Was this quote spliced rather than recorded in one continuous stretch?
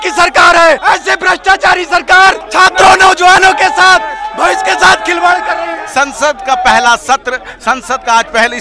yes; 3 cuts; at 0.8 s, 2.4 s, 5.8 s

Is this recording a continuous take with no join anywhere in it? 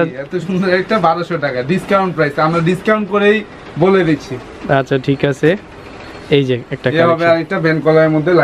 yes; 0 cuts

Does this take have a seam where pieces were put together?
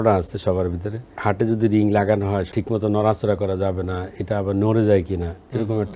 yes; 2 cuts; at 1.2 s, 2.5 s

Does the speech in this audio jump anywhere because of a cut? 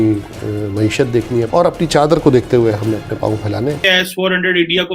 yes; 2 cuts; at 1.5 s, 3.8 s

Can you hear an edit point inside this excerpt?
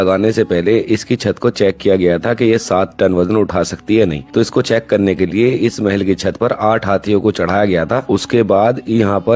no; 0 cuts

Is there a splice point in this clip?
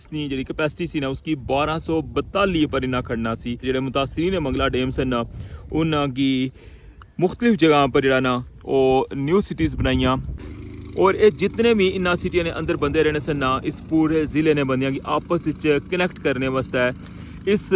yes; 2 cuts; at 3.7 s, 10.3 s

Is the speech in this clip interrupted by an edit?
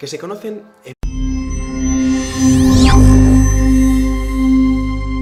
no; 0 cuts

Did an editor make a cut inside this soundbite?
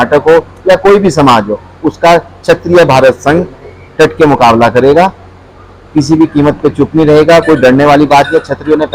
no; 0 cuts

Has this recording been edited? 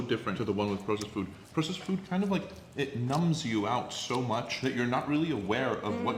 no; 0 cuts

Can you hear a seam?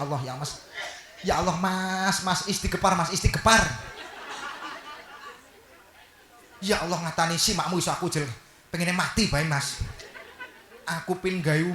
no; 0 cuts

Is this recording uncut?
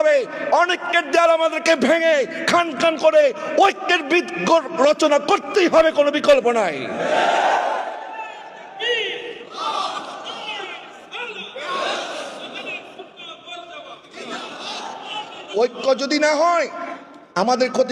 yes; 0 cuts

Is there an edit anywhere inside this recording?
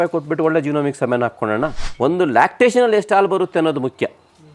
yes; 1 cut; at 1.8 s

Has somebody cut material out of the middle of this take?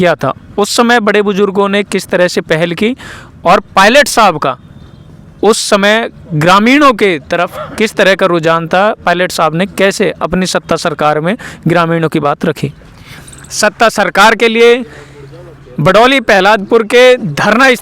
yes; 1 cut; at 13.2 s

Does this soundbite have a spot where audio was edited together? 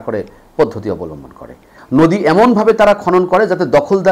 yes; 1 cut; at 1.8 s

